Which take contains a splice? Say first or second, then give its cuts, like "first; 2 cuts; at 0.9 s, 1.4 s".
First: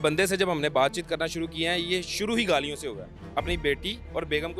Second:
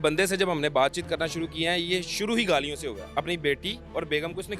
second; 1 cut; at 3.0 s